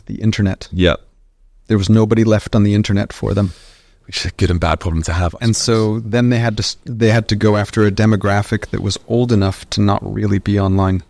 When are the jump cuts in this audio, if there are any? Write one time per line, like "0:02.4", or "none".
none